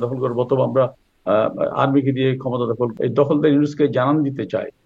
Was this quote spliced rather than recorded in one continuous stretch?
yes; 1 cut; at 2.9 s

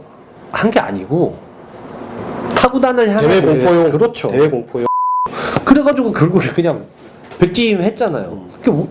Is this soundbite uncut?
no; 1 cut; at 5.0 s

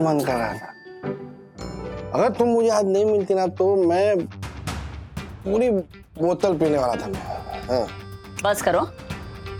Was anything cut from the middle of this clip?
no; 0 cuts

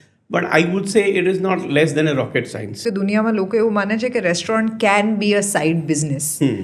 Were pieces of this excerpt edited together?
yes; 1 cut; at 2.8 s

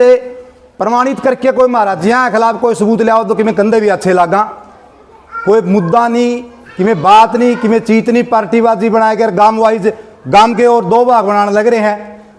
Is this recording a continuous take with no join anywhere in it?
yes; 0 cuts

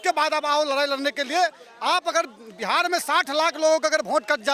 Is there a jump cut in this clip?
no; 0 cuts

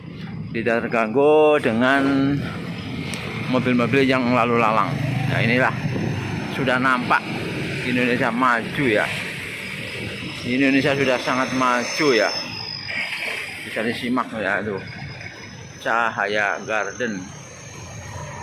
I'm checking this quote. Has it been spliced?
no; 0 cuts

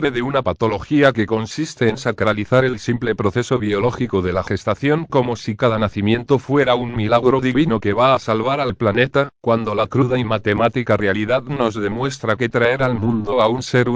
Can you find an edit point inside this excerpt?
yes; 1 cut; at 1.1 s

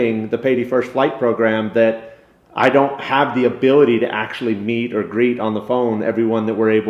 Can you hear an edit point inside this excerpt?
no; 0 cuts

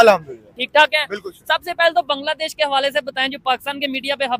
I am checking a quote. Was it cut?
no; 0 cuts

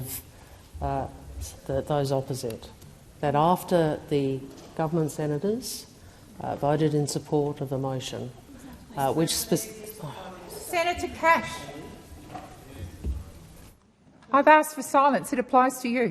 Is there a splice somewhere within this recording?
no; 0 cuts

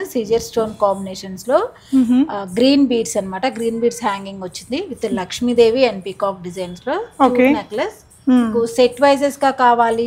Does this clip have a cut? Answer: no; 0 cuts

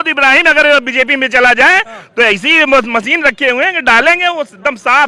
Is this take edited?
no; 0 cuts

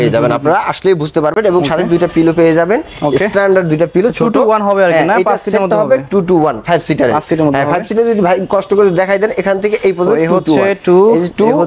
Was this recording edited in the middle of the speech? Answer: no; 0 cuts

